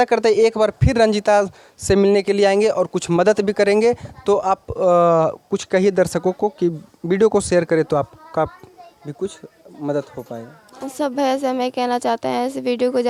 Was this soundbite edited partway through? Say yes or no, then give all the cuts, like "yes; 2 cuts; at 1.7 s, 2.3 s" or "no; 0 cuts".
no; 0 cuts